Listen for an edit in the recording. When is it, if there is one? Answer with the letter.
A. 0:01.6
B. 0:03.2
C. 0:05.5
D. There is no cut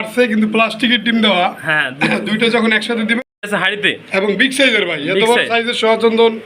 B